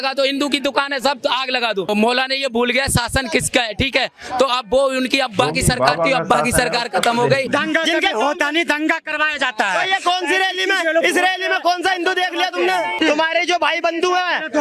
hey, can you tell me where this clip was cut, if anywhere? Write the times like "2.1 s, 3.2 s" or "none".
1.9 s, 7.5 s, 12.9 s